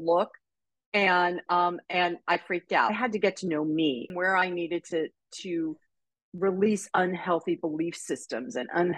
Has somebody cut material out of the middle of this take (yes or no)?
yes